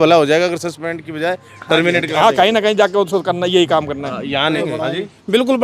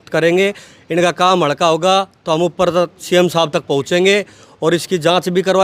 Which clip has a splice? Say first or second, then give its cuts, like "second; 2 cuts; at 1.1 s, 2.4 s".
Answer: first; 1 cut; at 4.6 s